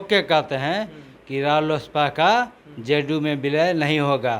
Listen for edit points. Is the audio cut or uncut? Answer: uncut